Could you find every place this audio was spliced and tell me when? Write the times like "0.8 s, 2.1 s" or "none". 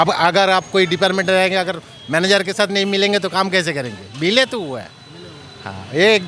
none